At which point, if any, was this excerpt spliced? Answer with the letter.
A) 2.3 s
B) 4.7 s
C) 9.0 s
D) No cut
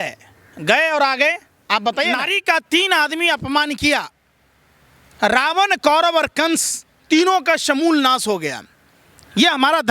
A